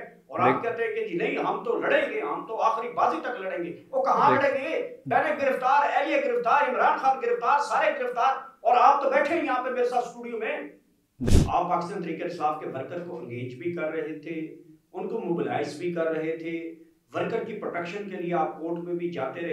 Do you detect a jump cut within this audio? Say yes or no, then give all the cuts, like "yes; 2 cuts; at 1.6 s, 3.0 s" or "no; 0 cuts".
yes; 1 cut; at 11.3 s